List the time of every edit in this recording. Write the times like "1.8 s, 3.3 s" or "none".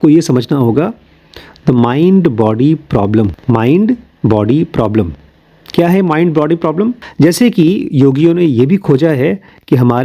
3.4 s, 7.0 s